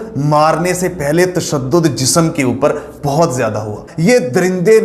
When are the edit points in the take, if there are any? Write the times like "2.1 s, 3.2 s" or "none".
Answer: 3.8 s